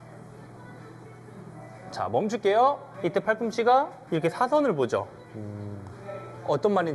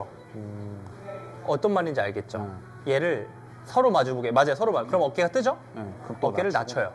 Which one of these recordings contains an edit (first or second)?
first